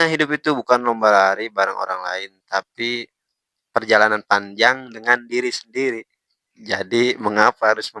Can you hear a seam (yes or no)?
no